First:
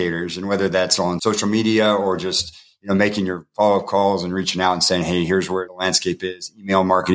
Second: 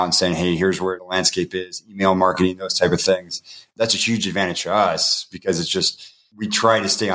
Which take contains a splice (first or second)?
second